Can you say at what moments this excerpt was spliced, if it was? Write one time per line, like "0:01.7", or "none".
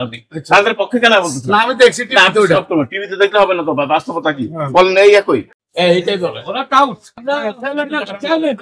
0:05.6